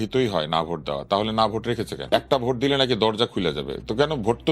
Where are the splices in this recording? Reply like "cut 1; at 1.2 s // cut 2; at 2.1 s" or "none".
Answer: cut 1; at 2.0 s